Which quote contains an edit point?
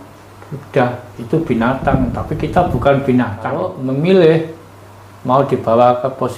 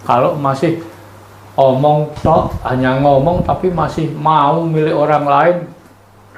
first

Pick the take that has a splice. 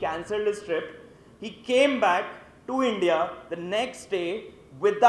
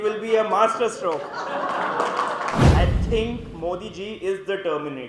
second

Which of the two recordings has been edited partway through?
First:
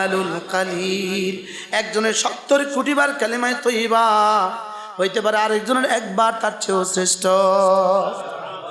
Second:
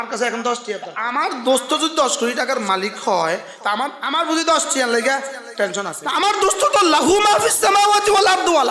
second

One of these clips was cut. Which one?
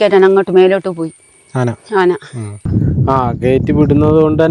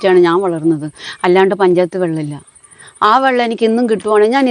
first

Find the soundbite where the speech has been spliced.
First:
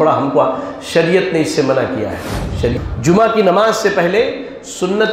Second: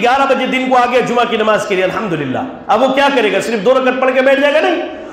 first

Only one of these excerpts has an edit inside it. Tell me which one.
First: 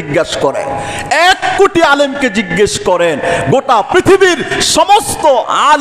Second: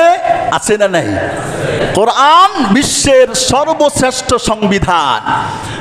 second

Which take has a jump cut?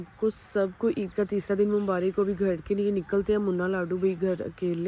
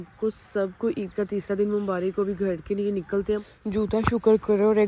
second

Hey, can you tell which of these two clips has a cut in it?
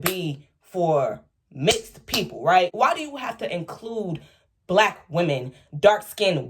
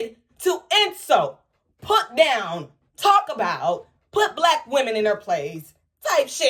first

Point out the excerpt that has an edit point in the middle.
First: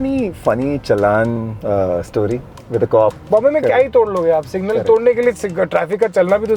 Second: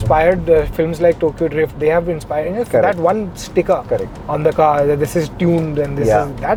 first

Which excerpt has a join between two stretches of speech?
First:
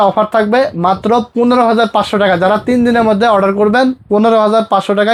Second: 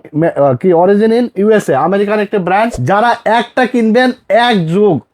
second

